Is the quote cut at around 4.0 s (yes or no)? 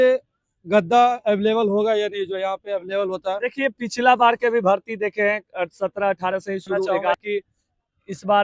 no